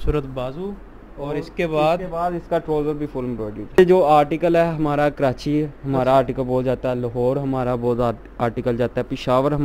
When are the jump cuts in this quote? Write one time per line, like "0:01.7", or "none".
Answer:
0:03.8

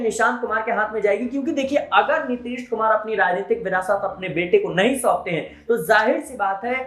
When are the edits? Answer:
none

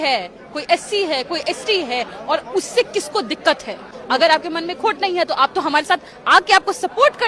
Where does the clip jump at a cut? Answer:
0:03.9

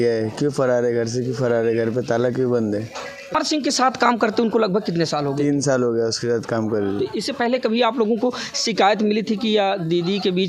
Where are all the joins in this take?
0:03.3

